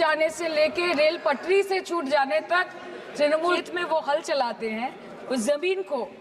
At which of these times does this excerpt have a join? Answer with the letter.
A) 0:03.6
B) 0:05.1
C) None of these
A